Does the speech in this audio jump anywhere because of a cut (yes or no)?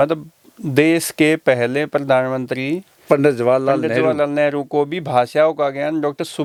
no